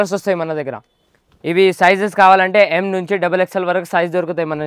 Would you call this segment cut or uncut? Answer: uncut